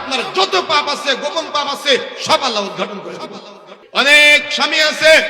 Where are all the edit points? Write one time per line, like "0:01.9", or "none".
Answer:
0:03.8